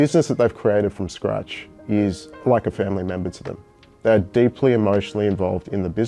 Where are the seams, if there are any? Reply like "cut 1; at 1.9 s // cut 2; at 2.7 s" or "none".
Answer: none